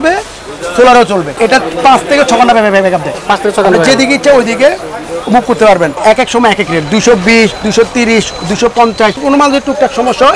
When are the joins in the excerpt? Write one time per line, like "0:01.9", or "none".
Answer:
0:01.4
0:06.0
0:09.2